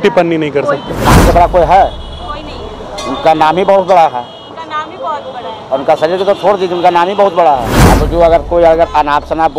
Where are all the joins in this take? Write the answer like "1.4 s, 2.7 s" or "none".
1.0 s, 7.7 s